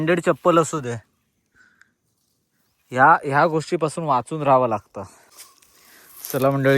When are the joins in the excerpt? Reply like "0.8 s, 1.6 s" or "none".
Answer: 5.4 s